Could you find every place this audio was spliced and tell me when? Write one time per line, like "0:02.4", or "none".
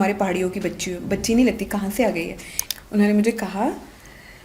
0:02.5